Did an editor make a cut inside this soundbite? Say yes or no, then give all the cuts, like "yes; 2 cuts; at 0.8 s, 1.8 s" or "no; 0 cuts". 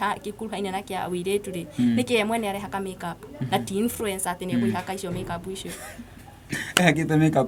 no; 0 cuts